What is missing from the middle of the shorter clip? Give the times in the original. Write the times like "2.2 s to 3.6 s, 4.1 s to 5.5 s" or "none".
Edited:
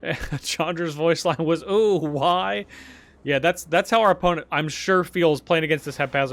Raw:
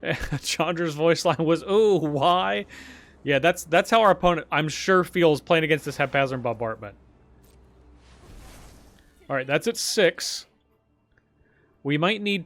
none